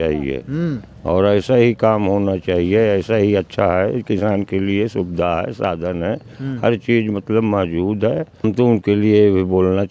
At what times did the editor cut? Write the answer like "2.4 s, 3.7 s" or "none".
8.3 s

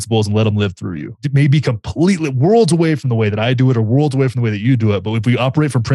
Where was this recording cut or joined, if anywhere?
1.2 s

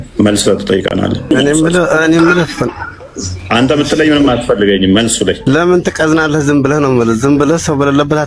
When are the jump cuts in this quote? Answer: 1.3 s, 5.4 s

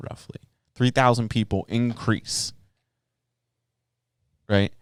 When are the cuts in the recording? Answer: none

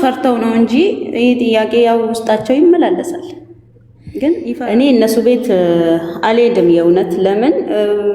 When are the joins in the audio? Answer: 4.5 s

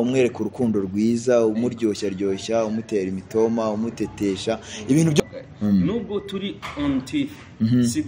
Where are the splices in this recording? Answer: 5.2 s

